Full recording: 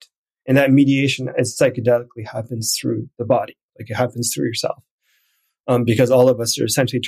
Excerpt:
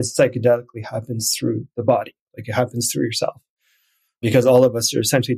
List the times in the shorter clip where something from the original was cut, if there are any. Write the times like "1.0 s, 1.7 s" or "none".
4.2 s